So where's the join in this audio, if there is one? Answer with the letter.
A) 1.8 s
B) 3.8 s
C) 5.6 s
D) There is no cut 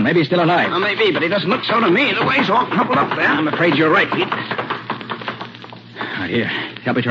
C